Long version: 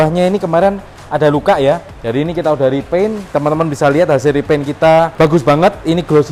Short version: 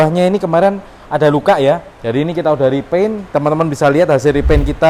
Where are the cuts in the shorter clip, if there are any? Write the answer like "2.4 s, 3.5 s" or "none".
none